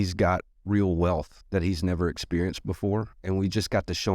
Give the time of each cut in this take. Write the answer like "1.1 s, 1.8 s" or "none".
1.4 s, 3.1 s